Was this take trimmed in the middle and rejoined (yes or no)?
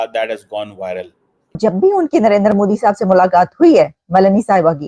yes